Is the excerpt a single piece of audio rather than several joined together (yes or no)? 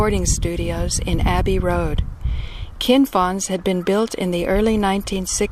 no